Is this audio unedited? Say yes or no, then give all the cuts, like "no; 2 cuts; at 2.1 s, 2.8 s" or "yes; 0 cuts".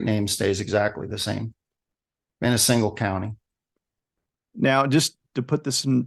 yes; 0 cuts